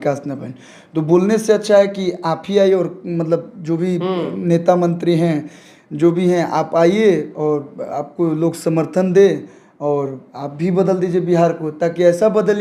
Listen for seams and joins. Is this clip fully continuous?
yes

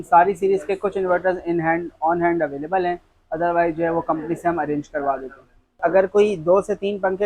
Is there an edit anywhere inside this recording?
yes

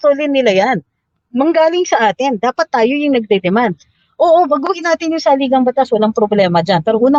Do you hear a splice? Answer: no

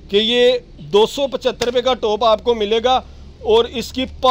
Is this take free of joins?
yes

